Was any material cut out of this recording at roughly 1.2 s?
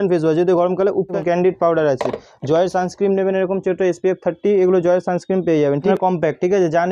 yes; 2 cuts; at 1.2 s, 5.9 s

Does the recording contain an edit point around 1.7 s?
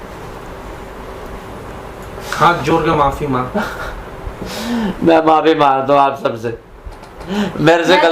no; 0 cuts

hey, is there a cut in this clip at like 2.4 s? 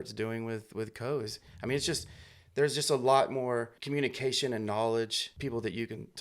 no; 2 cuts; at 3.8 s, 5.2 s

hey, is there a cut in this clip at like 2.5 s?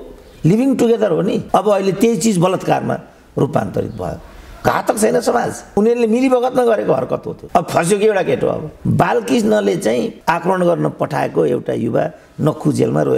no; 1 cut; at 8.7 s

